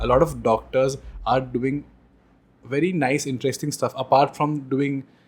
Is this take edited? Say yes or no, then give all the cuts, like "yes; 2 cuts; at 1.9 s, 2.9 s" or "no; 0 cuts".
no; 0 cuts